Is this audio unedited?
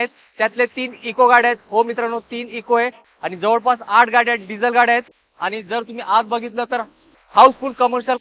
yes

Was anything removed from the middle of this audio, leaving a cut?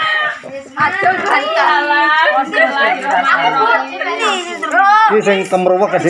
no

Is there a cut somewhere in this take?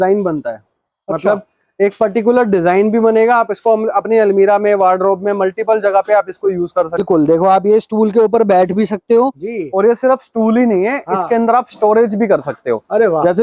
yes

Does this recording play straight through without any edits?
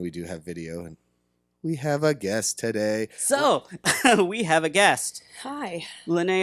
no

